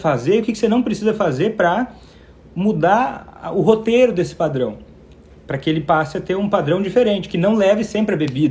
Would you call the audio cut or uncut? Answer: uncut